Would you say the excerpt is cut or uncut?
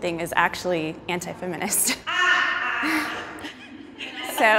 uncut